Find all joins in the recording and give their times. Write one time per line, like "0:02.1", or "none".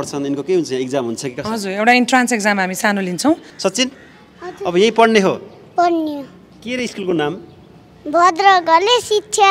0:03.5